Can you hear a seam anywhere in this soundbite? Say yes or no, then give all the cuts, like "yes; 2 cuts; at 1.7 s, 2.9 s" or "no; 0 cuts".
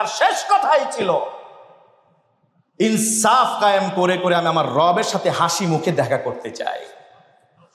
no; 0 cuts